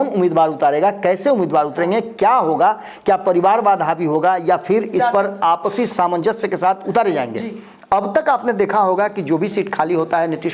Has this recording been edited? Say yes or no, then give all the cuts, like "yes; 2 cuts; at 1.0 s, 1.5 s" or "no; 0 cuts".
no; 0 cuts